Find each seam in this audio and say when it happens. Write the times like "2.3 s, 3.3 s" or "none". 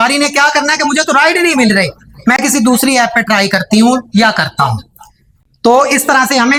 none